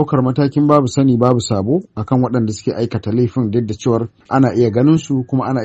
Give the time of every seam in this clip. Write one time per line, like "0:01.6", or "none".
0:04.2